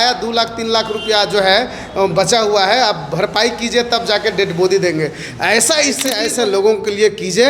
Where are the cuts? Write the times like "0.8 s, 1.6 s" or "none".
6.1 s

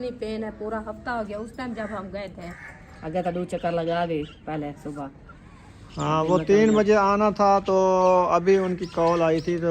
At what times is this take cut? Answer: 2.5 s, 4.4 s

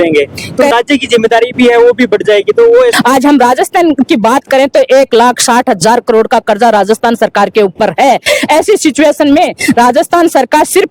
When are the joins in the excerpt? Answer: 0.7 s, 2.9 s

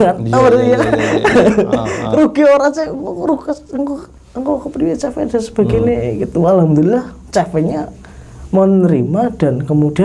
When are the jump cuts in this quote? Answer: none

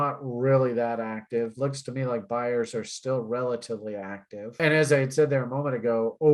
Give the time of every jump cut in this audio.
4.6 s

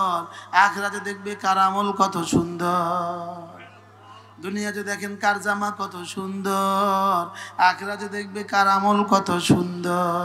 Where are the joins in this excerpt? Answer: none

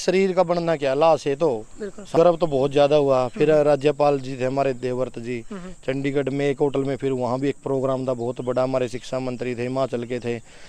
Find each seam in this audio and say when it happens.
2.0 s

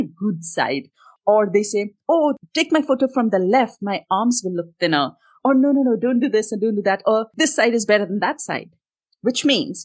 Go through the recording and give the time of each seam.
1.1 s, 2.4 s, 7.3 s

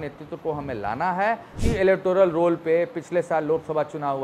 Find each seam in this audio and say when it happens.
1.5 s

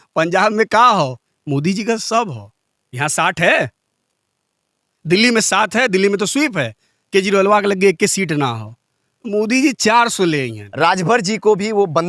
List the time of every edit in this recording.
10.6 s

